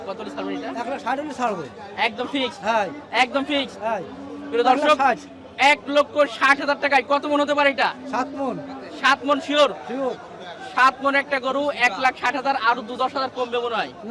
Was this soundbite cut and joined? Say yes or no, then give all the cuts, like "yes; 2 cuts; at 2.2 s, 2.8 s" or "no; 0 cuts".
no; 0 cuts